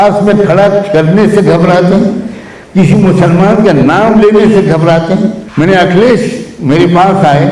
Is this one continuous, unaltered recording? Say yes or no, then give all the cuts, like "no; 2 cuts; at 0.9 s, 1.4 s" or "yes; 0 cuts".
no; 1 cut; at 5.4 s